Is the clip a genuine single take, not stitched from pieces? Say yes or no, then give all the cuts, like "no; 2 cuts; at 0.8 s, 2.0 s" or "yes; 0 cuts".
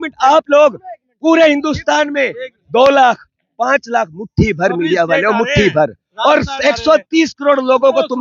yes; 0 cuts